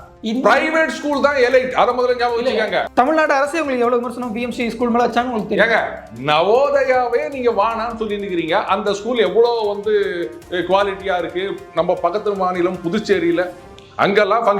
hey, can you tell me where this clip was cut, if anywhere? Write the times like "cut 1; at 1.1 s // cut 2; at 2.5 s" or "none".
cut 1; at 2.9 s